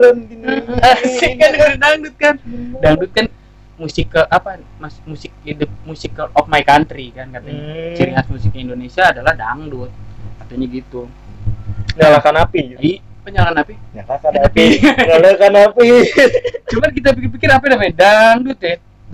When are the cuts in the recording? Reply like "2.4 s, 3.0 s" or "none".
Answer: none